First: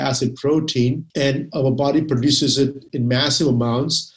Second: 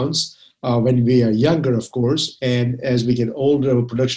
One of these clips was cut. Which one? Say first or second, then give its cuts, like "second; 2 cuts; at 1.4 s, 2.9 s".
first; 2 cuts; at 1.0 s, 2.8 s